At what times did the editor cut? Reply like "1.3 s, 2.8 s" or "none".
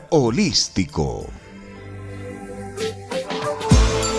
1.3 s